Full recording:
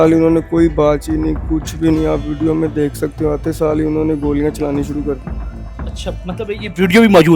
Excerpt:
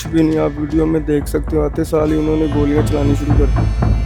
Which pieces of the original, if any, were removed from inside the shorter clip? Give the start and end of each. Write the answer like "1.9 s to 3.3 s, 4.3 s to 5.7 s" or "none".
none